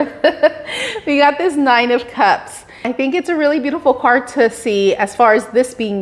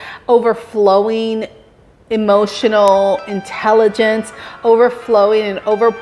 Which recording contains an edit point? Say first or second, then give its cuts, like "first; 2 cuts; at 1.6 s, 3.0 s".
first; 1 cut; at 2.8 s